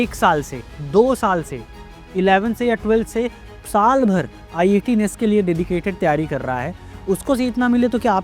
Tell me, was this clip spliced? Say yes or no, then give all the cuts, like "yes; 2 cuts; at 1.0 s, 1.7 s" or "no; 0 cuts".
no; 0 cuts